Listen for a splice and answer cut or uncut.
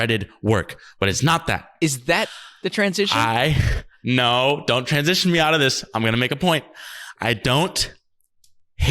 cut